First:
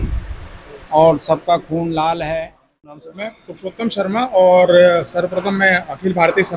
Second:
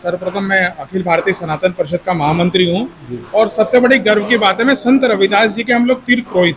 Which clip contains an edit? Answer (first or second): first